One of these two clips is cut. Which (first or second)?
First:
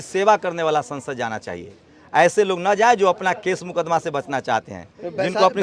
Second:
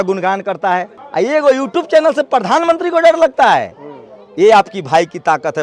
second